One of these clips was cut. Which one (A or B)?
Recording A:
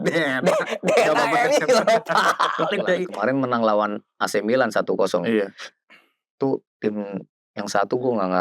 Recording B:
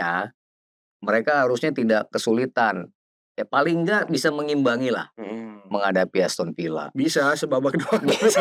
A